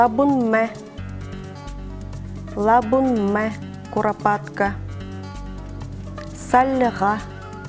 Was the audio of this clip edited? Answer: no; 0 cuts

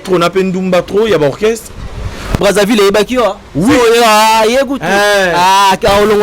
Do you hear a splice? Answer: yes; 1 cut; at 2.4 s

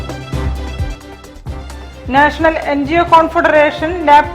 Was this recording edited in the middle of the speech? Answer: yes; 1 cut; at 1.4 s

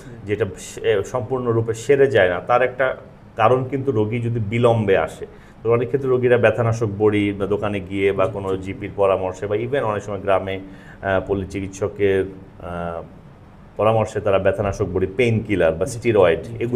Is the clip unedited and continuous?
yes; 0 cuts

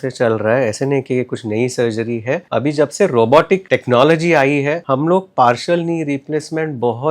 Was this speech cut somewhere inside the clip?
yes; 3 cuts; at 2.4 s, 3.6 s, 4.8 s

